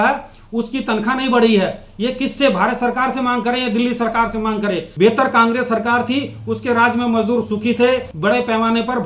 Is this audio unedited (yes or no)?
no